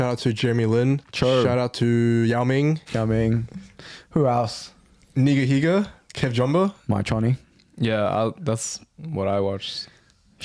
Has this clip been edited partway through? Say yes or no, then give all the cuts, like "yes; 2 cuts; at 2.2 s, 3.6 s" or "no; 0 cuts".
yes; 3 cuts; at 1.1 s, 2.8 s, 6.8 s